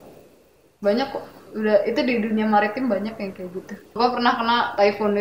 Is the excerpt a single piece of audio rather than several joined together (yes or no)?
no